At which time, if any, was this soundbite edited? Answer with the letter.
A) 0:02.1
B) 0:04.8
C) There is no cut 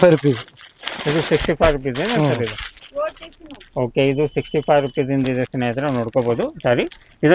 C